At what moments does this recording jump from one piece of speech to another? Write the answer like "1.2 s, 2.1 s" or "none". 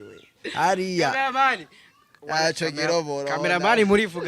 none